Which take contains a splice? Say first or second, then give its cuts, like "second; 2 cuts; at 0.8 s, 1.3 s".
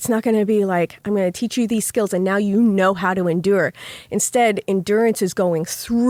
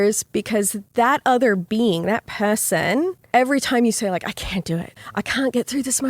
second; 2 cuts; at 3.2 s, 5.0 s